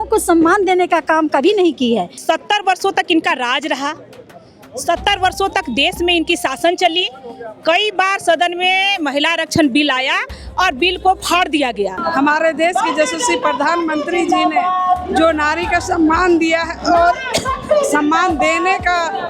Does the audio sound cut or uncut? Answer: cut